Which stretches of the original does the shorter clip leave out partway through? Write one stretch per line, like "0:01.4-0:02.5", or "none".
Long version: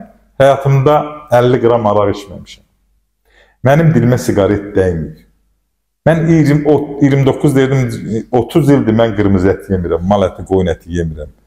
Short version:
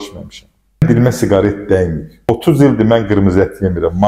0:03.0-0:03.9
0:05.4-0:08.4